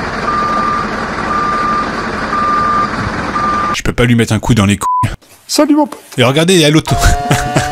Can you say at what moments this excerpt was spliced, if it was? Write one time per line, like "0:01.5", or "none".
0:03.8